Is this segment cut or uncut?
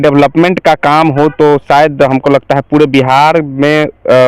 uncut